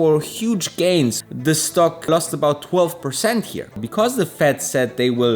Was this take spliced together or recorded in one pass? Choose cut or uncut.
cut